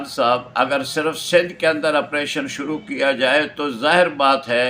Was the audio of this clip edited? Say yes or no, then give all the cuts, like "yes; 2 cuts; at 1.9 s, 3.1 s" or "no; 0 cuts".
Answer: no; 0 cuts